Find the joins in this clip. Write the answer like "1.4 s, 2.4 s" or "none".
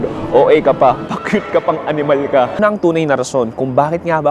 2.6 s